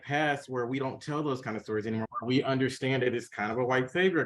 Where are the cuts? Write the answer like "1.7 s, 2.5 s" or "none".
2.0 s

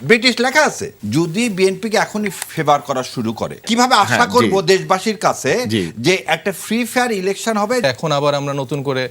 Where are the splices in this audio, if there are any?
0.9 s, 3.6 s, 7.8 s

